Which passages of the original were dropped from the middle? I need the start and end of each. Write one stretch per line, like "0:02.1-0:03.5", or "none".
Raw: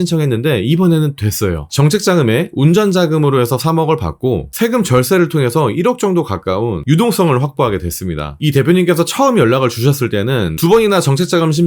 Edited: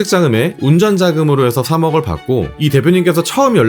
0:04.5-0:08.3